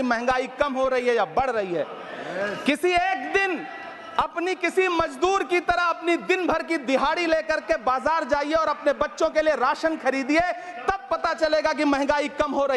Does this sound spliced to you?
no; 0 cuts

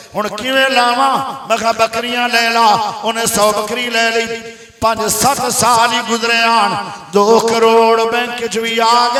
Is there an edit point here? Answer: no; 0 cuts

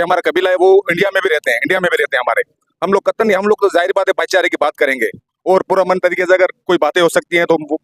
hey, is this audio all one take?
yes; 0 cuts

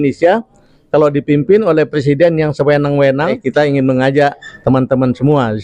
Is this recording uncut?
no; 1 cut; at 3.4 s

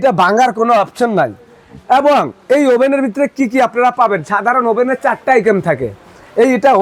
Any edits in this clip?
no; 0 cuts

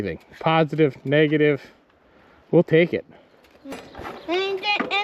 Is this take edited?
yes; 1 cut; at 3.7 s

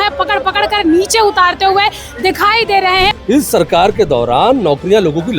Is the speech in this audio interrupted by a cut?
yes; 1 cut; at 3.1 s

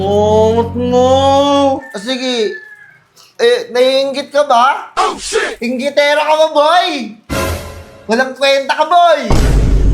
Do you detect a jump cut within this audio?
no; 0 cuts

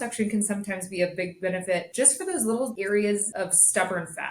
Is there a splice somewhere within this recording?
yes; 3 cuts; at 1.9 s, 2.8 s, 3.3 s

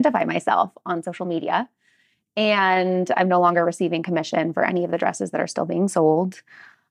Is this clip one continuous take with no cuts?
yes; 0 cuts

